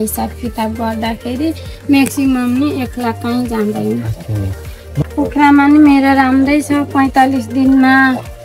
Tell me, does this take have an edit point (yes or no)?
yes